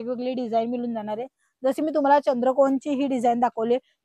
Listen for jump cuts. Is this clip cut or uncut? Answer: uncut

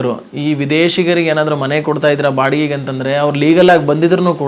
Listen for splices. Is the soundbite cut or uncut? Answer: uncut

